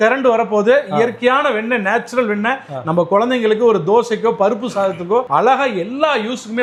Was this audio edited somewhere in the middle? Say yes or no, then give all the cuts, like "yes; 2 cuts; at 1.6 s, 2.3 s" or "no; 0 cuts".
no; 0 cuts